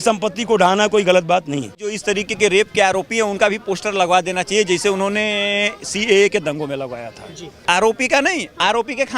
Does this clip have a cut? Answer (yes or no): yes